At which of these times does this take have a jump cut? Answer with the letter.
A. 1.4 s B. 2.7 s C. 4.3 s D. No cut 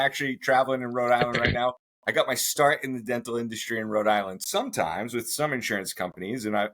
C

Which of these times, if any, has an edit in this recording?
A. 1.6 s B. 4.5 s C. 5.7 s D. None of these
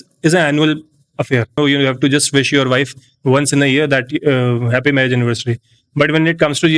A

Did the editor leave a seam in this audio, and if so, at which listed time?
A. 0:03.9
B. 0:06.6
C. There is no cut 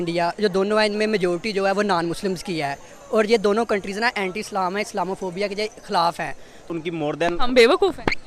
B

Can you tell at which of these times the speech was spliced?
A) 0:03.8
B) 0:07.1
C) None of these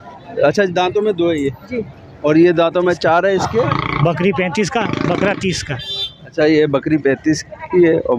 A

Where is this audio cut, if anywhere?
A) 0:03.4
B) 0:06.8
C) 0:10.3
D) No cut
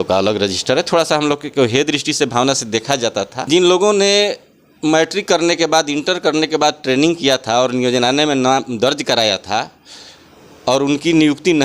A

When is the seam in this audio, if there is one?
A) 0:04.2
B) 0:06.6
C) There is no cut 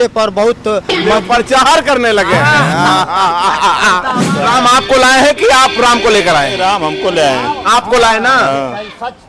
A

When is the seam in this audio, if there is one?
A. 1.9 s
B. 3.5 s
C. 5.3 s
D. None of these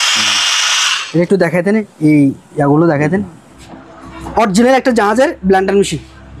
B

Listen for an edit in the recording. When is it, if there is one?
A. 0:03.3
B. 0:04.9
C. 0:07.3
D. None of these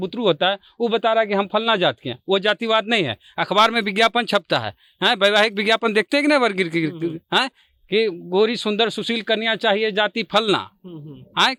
D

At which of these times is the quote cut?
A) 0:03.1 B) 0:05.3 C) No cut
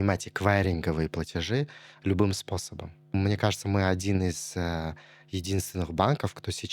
A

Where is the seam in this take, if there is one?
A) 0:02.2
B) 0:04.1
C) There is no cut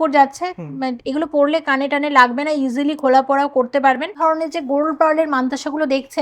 B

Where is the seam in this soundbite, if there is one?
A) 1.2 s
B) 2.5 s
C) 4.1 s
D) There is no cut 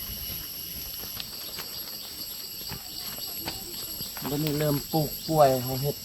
A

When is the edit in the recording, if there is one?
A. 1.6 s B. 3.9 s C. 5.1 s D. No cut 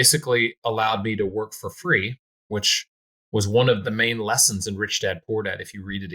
B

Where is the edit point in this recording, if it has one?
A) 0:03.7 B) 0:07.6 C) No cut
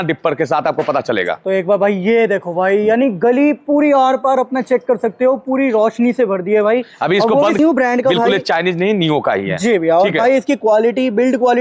B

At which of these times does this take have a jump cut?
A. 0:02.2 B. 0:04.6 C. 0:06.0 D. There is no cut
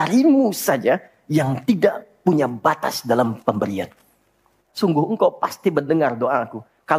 B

